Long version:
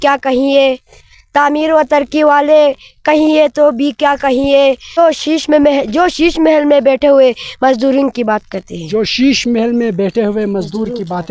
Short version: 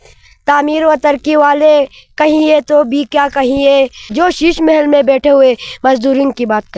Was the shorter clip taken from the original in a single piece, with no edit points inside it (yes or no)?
no